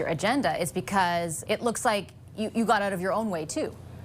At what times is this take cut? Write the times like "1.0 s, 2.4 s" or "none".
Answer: 1.4 s